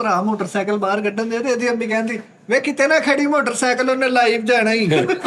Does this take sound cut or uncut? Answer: uncut